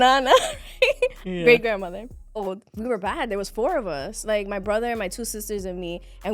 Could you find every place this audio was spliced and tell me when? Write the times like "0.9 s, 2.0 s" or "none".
2.8 s